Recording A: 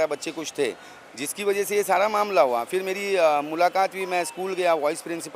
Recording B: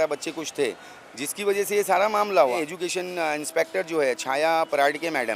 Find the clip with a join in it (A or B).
B